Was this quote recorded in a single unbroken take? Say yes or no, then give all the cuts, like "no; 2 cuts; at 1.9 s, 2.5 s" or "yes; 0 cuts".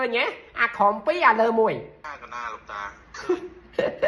no; 1 cut; at 2.1 s